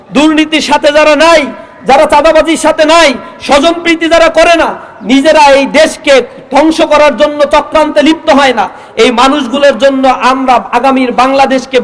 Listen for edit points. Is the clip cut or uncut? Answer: uncut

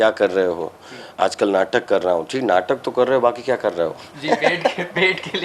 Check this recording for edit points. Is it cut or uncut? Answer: uncut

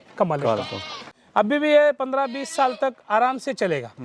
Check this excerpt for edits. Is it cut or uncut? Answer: cut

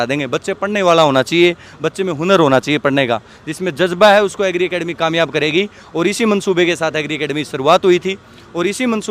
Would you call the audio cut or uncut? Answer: uncut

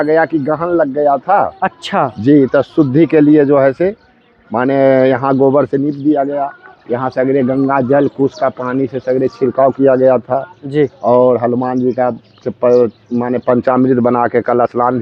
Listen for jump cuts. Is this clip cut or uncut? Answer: uncut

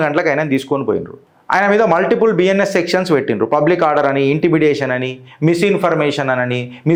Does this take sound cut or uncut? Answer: uncut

